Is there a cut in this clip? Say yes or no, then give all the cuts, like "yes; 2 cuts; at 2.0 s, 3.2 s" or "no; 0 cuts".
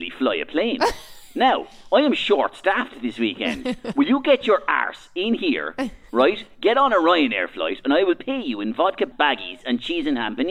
yes; 1 cut; at 9.1 s